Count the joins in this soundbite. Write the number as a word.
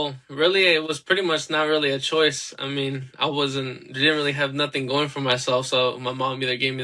zero